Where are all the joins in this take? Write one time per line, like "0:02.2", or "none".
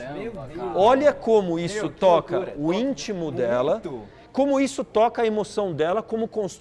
none